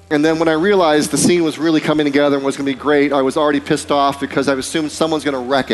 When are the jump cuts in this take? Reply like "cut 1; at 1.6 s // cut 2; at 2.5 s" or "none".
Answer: none